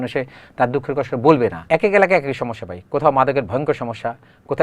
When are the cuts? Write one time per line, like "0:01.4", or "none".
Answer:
0:01.6